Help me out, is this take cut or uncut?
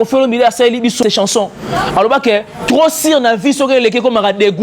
cut